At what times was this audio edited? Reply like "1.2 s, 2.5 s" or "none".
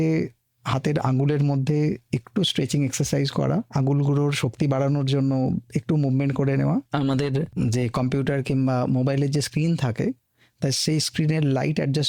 3.7 s, 7.3 s